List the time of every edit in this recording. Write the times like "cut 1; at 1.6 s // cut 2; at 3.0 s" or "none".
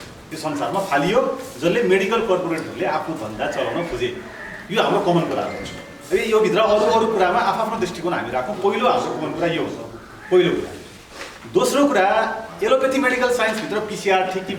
none